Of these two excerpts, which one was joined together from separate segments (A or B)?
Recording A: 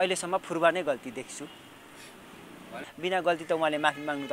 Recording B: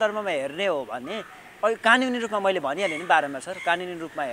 A